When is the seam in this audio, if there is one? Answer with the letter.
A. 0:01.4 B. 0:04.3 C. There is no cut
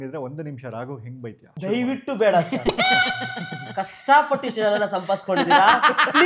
A